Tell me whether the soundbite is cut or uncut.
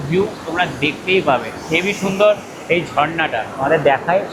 uncut